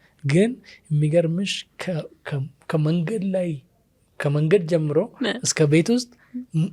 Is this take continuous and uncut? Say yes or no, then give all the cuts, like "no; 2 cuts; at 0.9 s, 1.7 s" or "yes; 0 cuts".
yes; 0 cuts